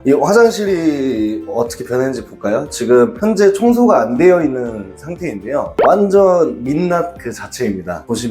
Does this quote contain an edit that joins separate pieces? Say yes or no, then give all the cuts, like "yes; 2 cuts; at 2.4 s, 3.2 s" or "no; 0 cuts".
no; 0 cuts